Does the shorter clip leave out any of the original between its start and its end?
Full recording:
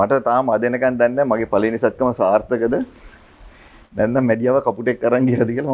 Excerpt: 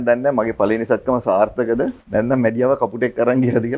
yes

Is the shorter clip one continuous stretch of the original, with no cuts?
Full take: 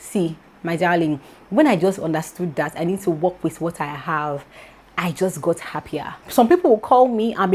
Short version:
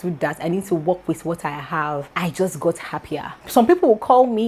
no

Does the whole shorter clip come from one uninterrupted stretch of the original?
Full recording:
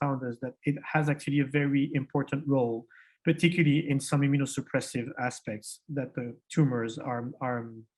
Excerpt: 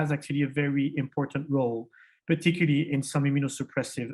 yes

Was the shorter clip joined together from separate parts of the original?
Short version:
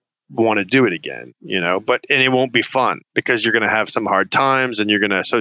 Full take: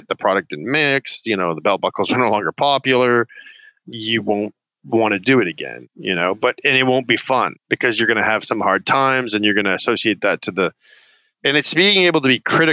no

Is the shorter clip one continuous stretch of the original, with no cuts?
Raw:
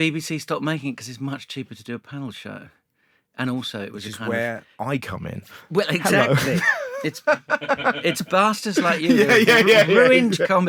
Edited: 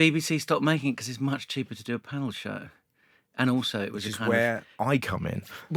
yes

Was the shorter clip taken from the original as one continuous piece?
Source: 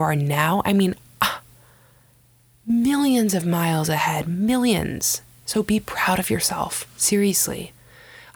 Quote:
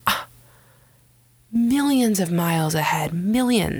yes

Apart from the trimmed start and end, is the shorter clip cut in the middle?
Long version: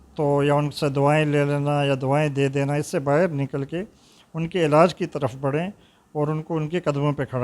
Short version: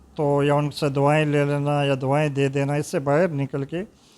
no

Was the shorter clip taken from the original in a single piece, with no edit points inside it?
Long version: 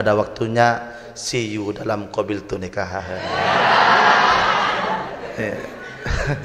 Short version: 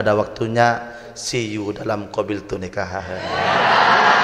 yes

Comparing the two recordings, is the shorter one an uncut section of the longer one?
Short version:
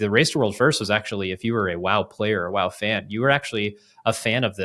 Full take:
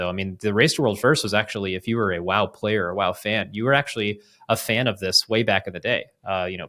yes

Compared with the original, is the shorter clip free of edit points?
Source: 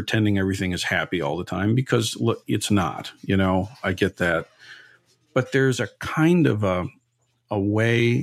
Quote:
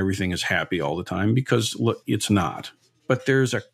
no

